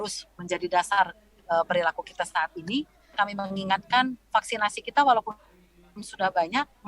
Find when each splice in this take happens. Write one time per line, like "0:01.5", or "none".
0:03.1